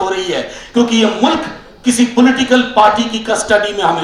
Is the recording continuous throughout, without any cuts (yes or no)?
yes